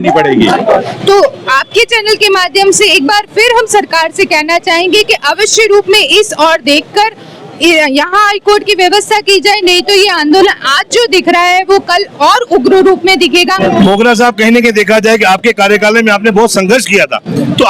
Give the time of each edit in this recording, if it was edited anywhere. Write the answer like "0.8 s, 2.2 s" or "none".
0.8 s, 13.6 s